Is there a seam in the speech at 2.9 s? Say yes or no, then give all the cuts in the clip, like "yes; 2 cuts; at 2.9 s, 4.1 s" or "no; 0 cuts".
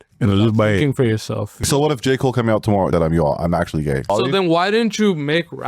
yes; 3 cuts; at 1.7 s, 2.9 s, 4.1 s